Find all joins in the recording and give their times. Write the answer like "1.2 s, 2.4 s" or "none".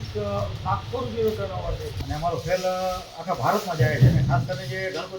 1.9 s